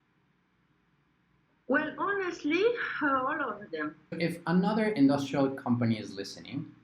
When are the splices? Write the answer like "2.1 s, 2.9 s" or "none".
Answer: 4.2 s